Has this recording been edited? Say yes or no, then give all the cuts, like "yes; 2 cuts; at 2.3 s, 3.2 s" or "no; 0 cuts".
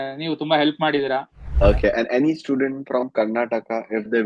yes; 1 cut; at 1.4 s